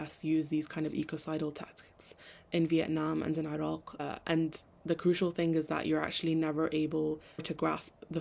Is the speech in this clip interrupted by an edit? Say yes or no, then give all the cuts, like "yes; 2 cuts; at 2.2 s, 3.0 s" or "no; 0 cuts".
yes; 1 cut; at 4.7 s